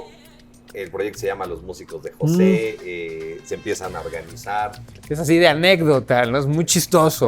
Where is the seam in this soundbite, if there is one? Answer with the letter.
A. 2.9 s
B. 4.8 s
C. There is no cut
B